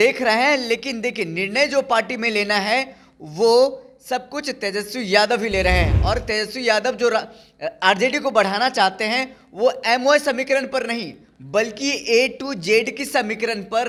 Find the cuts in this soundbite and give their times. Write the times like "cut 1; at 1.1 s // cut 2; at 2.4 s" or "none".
none